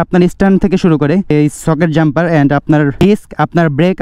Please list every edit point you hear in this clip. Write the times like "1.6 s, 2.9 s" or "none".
1.3 s, 3.0 s

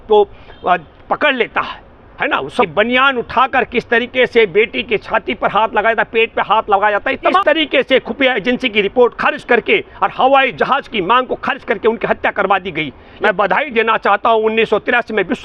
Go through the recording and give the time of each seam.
2.7 s, 7.4 s, 13.1 s

